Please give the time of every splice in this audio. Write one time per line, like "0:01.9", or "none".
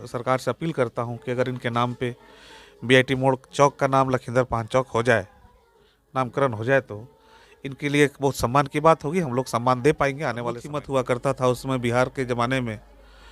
0:10.7